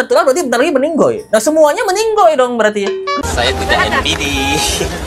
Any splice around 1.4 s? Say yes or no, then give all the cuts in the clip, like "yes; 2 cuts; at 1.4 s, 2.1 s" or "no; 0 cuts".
no; 1 cut; at 3.1 s